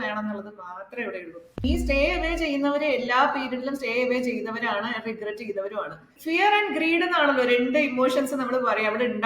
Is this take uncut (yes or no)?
no